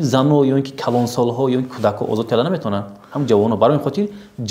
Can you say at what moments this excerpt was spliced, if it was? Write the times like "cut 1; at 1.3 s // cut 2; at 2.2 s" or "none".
none

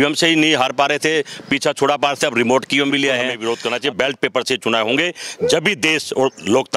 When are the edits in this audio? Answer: cut 1; at 3.3 s

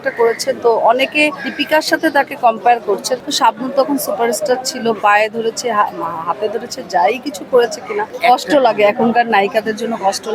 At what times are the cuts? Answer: cut 1; at 1.5 s // cut 2; at 3.1 s // cut 3; at 8.1 s

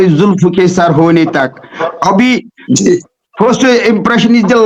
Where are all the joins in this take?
none

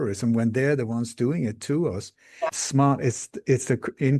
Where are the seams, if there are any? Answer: cut 1; at 2.5 s

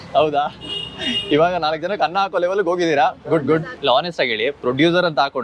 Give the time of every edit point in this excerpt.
cut 1; at 3.7 s

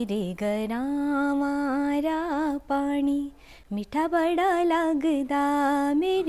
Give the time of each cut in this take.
none

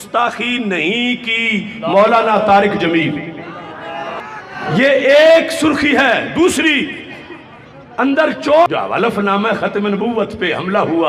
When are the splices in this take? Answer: cut 1; at 8.7 s

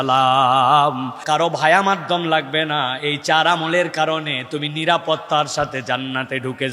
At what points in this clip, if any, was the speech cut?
cut 1; at 1.2 s

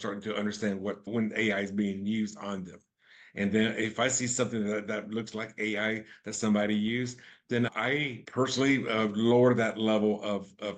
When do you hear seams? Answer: cut 1; at 8.2 s

